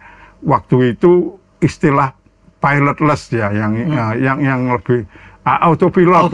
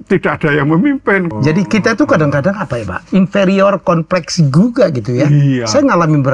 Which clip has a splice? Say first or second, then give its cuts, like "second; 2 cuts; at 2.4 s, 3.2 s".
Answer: second; 1 cut; at 1.3 s